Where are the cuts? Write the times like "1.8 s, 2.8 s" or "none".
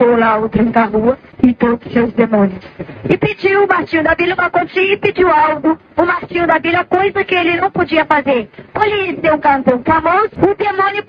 1.3 s, 10.3 s